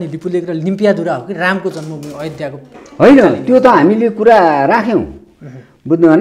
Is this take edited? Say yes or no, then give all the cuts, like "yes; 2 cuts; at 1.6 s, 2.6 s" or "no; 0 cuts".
no; 0 cuts